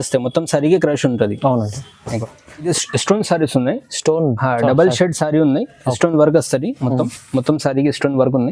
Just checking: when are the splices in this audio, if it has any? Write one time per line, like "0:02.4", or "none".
0:02.7